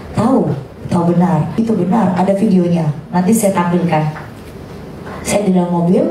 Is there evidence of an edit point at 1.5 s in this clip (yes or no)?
yes